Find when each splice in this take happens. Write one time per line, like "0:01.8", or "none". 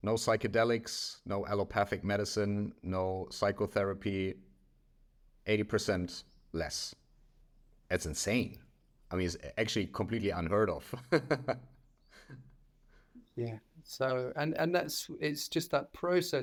none